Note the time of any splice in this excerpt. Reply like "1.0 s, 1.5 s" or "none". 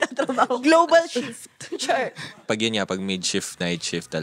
2.5 s